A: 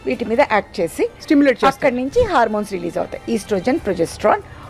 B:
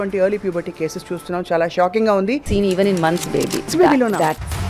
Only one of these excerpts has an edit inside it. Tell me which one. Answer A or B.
B